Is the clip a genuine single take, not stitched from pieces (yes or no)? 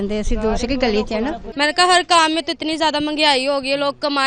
no